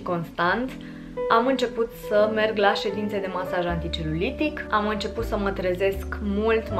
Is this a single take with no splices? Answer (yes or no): yes